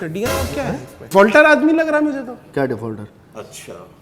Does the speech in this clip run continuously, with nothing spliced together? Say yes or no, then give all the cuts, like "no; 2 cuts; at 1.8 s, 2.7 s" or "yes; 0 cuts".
no; 1 cut; at 0.9 s